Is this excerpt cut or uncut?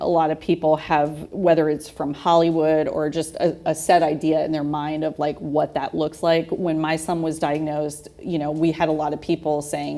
cut